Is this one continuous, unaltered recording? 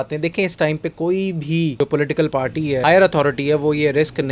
no; 2 cuts; at 1.8 s, 2.8 s

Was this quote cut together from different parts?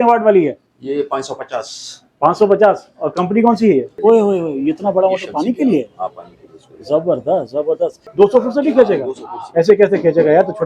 yes; 2 cuts; at 3.9 s, 8.0 s

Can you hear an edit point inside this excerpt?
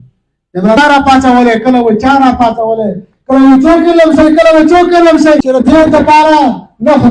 yes; 2 cuts; at 0.8 s, 5.4 s

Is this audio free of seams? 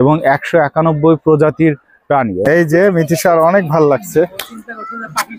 no; 1 cut; at 2.4 s

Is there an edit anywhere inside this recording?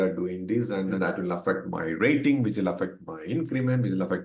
yes; 1 cut; at 1.0 s

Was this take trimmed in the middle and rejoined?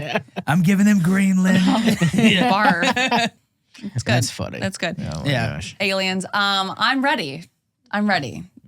yes; 1 cut; at 3.4 s

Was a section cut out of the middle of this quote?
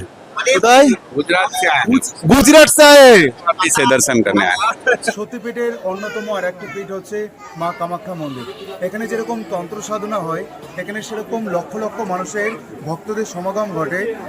yes; 1 cut; at 5.2 s

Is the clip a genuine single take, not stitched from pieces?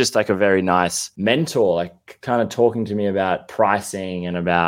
no; 1 cut; at 1.1 s

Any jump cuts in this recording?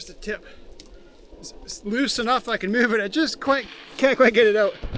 no; 0 cuts

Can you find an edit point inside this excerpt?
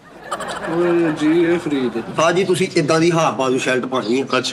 yes; 1 cut; at 2.0 s

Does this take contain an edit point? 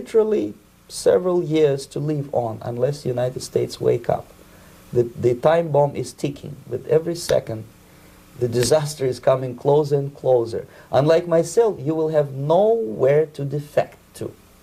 no; 0 cuts

